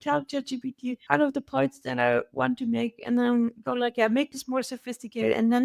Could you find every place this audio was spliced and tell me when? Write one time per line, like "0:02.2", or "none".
0:01.0